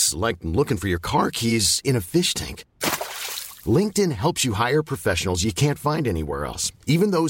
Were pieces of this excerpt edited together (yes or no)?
no